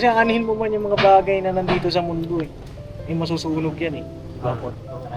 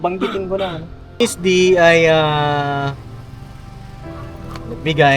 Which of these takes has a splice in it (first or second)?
second